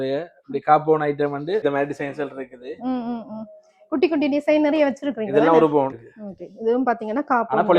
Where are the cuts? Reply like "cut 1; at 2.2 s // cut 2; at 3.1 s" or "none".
cut 1; at 1.6 s // cut 2; at 6.0 s

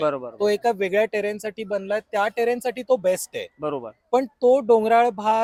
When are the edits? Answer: none

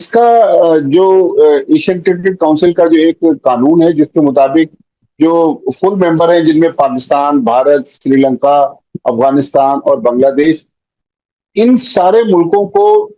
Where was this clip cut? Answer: none

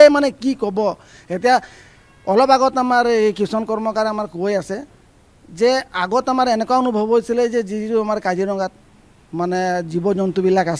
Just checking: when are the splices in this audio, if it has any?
none

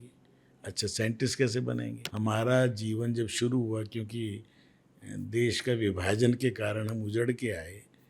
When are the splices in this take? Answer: cut 1; at 2.0 s

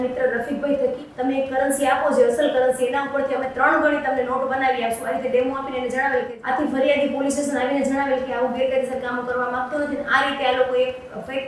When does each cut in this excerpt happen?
cut 1; at 1.1 s // cut 2; at 6.3 s

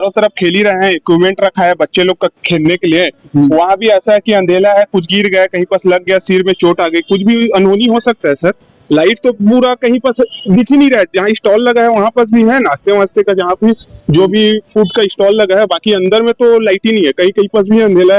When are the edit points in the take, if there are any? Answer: none

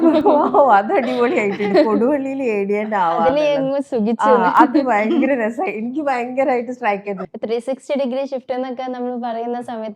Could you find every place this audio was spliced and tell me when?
cut 1; at 7.2 s

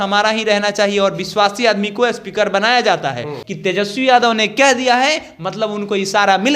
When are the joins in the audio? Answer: cut 1; at 3.4 s

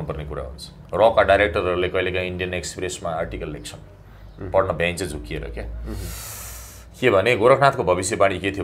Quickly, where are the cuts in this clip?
none

